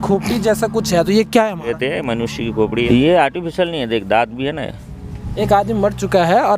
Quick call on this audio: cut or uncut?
cut